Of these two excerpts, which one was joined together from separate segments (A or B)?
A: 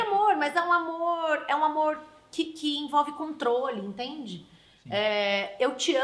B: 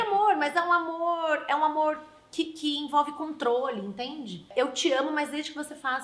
B